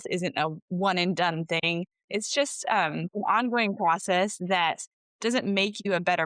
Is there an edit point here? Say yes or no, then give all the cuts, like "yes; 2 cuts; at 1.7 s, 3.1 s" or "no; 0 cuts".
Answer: yes; 1 cut; at 2.0 s